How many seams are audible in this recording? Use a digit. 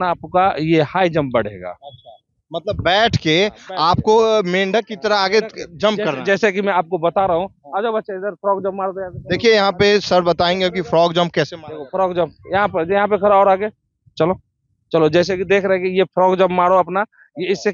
0